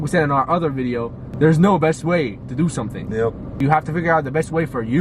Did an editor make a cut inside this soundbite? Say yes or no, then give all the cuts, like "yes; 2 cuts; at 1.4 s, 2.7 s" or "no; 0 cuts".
yes; 2 cuts; at 1.2 s, 3.5 s